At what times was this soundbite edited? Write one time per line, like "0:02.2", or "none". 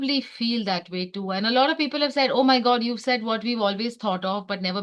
none